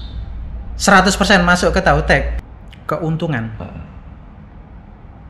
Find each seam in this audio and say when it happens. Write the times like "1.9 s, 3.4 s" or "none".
2.3 s